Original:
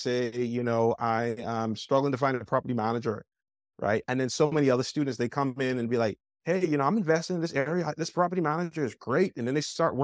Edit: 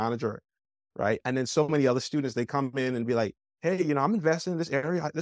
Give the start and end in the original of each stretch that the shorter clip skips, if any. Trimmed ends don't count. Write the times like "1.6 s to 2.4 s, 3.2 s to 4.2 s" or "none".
none

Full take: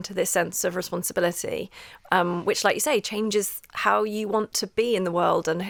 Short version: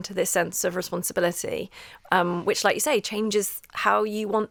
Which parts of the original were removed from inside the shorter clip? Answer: none

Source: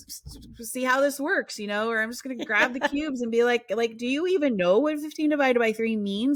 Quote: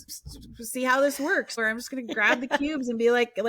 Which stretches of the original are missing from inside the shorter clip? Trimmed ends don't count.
1.6 s to 1.9 s

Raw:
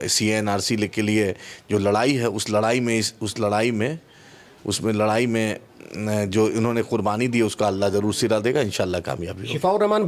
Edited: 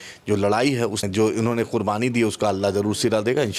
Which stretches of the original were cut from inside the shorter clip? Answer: 2.5 s to 6.2 s

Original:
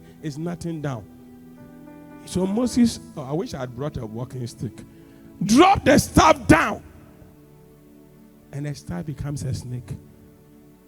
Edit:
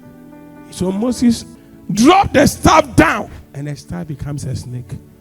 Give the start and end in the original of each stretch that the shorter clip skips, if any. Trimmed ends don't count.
3.1 s to 5.1 s, 6.9 s to 8.4 s

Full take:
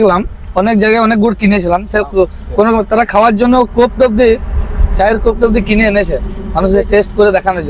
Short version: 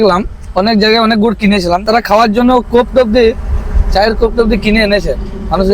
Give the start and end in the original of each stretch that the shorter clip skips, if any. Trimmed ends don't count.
1.8 s to 2.9 s

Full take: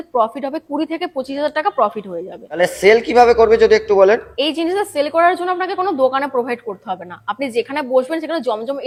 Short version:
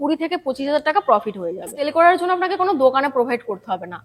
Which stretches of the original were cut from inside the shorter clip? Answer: 2.4 s to 4.9 s

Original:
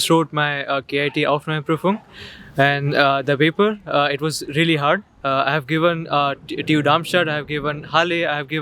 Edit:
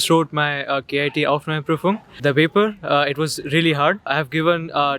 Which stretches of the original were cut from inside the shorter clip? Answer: 2.2 s to 3.2 s, 5.1 s to 5.5 s

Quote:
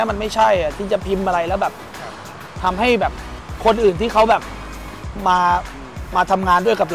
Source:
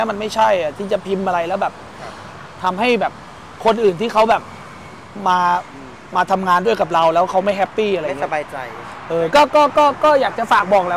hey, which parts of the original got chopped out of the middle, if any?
none

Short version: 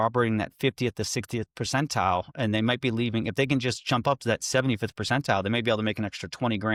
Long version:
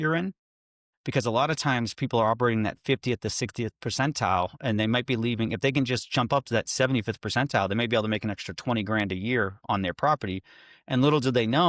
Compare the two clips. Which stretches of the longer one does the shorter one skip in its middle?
none

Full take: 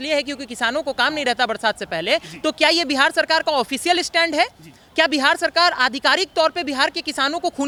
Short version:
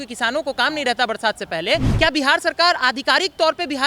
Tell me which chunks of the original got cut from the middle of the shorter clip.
2.3 s to 4.9 s

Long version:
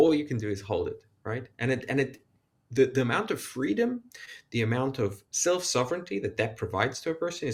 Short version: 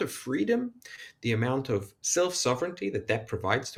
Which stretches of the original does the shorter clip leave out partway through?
none

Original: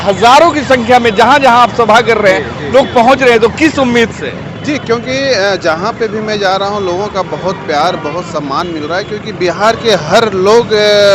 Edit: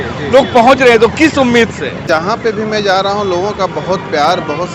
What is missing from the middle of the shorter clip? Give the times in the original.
4.4 s to 5.6 s

